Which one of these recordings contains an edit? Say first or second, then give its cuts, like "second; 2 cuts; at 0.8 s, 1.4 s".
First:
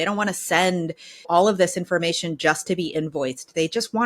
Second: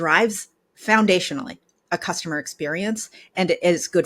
first; 1 cut; at 1.3 s